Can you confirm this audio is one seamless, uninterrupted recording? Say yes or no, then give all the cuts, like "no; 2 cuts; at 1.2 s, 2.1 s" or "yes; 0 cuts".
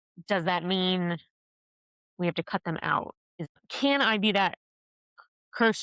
no; 1 cut; at 3.3 s